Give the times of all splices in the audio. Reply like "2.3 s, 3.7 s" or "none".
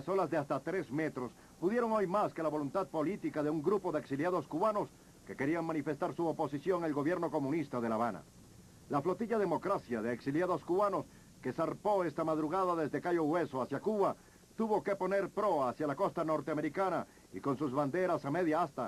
none